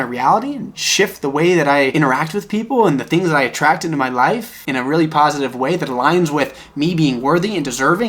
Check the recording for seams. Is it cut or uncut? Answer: cut